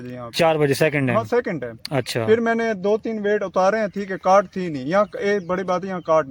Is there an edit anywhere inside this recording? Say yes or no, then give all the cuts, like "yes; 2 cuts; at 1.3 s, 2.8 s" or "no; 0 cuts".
no; 0 cuts